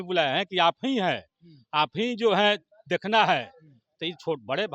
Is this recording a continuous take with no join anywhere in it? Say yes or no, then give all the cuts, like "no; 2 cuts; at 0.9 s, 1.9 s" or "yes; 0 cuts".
yes; 0 cuts